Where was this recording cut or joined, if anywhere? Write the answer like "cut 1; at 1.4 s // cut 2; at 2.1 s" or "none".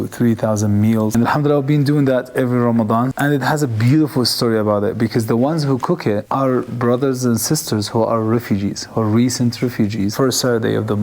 cut 1; at 1.1 s // cut 2; at 3.1 s // cut 3; at 10.1 s